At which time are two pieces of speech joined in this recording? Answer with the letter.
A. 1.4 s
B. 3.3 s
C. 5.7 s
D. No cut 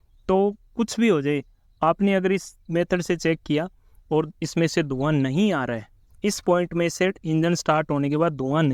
D